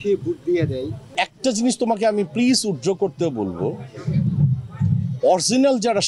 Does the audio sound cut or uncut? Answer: cut